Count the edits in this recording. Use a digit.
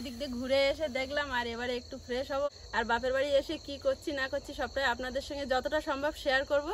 1